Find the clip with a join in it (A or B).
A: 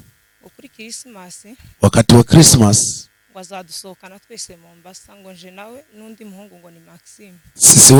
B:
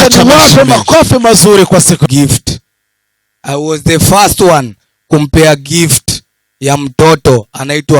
B